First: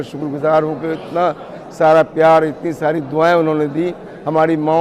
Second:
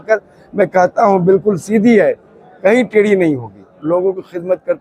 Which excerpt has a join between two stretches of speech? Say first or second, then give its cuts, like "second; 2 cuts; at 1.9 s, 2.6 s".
second; 1 cut; at 3.7 s